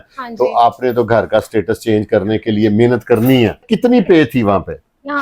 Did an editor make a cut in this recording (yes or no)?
yes